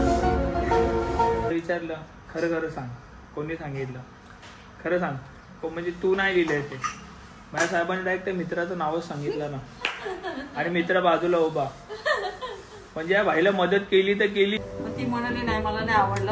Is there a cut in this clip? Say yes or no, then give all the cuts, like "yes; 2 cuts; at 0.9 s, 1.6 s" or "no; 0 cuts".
yes; 2 cuts; at 1.5 s, 14.6 s